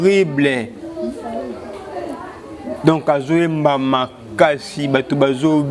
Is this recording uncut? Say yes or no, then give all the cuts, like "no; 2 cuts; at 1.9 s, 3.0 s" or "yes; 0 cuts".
yes; 0 cuts